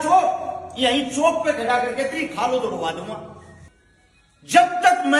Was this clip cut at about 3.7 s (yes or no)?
yes